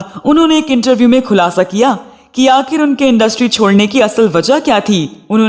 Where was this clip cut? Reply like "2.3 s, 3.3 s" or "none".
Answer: none